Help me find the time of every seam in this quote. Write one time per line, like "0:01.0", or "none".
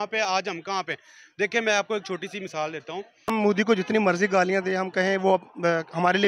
0:03.3